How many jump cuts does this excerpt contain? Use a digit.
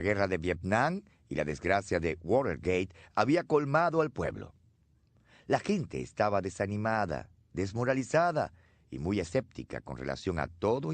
0